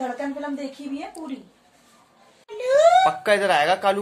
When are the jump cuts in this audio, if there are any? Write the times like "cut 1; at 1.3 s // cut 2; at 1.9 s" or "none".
cut 1; at 2.5 s